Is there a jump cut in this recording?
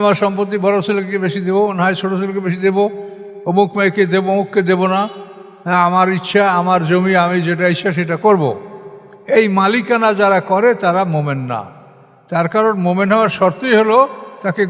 no; 0 cuts

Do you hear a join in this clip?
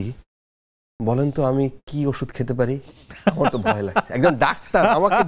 no; 0 cuts

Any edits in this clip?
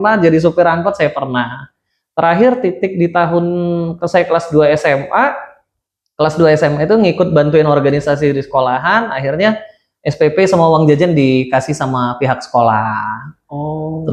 no; 0 cuts

